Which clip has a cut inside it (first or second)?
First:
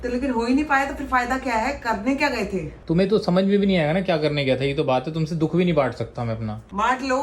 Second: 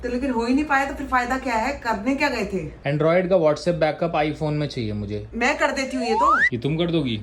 second